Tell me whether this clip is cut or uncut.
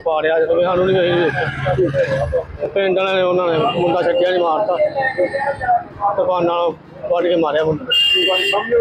uncut